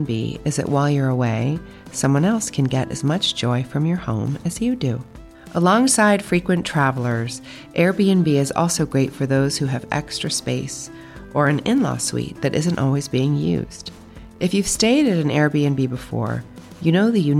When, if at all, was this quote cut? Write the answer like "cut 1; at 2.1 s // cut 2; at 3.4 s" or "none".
none